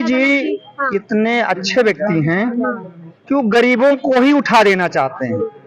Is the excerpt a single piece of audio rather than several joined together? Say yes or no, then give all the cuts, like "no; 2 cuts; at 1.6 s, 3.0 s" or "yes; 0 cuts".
yes; 0 cuts